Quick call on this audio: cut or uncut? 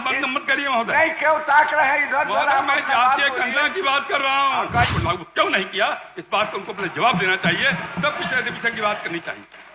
cut